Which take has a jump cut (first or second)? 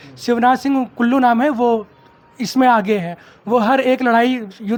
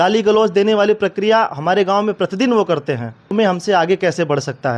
second